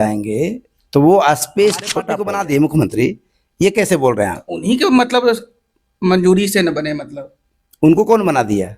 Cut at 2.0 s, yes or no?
yes